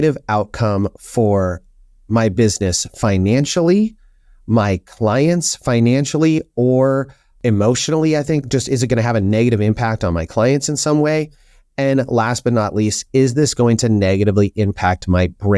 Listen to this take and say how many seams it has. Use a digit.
0